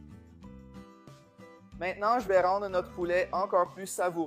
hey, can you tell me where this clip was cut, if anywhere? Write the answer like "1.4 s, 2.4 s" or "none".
1.7 s